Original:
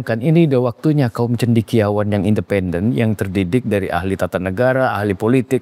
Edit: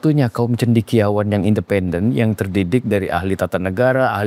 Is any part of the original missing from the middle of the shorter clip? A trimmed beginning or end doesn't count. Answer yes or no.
no